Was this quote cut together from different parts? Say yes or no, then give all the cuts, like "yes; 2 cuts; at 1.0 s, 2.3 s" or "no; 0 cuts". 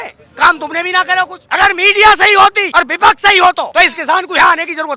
yes; 3 cuts; at 1.4 s, 2.6 s, 3.7 s